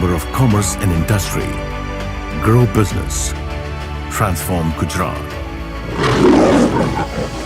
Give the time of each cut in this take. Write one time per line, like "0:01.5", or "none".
none